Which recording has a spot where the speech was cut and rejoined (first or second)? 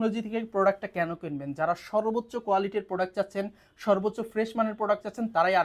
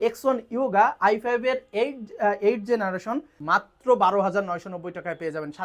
second